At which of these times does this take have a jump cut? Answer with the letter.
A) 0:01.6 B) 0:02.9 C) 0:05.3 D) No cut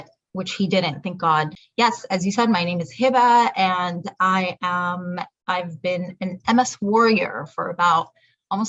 A